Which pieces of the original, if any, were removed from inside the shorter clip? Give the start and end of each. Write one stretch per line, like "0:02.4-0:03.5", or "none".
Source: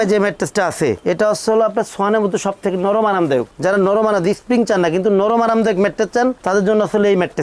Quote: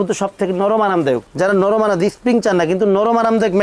none